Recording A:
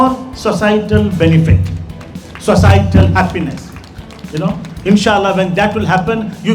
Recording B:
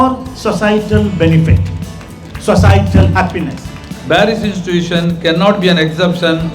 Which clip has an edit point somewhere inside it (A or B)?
B